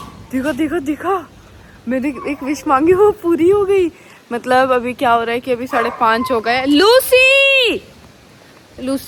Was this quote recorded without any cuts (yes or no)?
yes